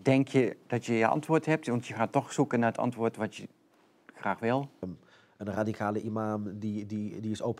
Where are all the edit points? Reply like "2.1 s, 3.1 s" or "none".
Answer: 5.0 s